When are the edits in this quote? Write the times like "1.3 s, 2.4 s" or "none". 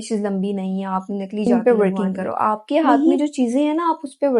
1.5 s